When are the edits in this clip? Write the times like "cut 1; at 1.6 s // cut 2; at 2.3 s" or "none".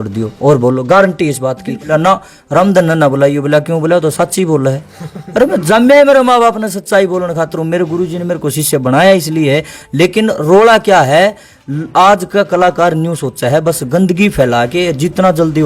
cut 1; at 1.9 s // cut 2; at 9.7 s